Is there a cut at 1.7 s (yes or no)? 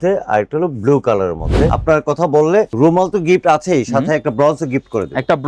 yes